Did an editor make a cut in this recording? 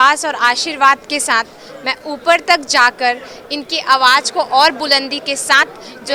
no; 0 cuts

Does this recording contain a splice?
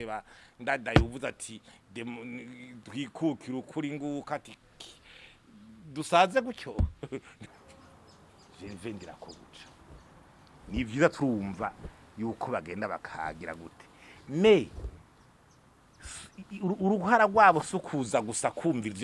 yes; 1 cut; at 7.4 s

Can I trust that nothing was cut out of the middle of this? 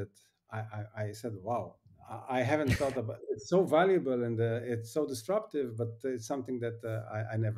yes; 0 cuts

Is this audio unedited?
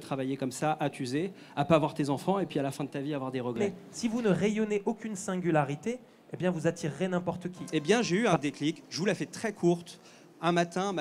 no; 2 cuts; at 3.6 s, 7.6 s

